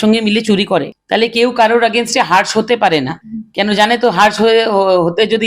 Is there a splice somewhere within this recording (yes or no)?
no